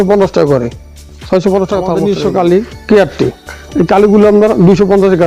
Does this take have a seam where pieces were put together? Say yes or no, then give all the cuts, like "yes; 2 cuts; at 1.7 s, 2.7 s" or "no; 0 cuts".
yes; 1 cut; at 2.0 s